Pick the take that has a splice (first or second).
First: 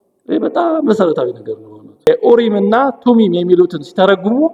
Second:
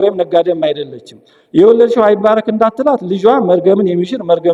first